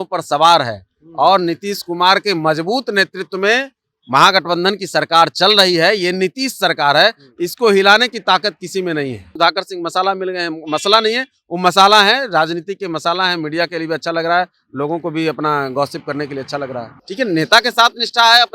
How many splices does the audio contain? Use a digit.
2